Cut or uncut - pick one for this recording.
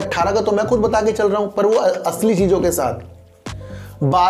uncut